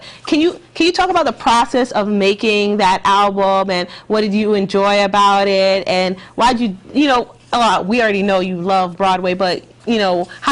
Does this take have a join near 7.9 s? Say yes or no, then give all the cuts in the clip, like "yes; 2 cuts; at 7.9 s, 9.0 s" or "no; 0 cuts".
yes; 1 cut; at 7.9 s